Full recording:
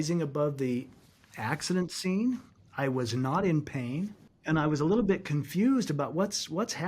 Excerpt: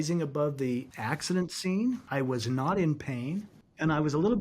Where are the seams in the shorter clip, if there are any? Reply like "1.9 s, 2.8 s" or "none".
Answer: 0.9 s, 2.0 s